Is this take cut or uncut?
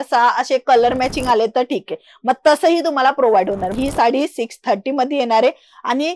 cut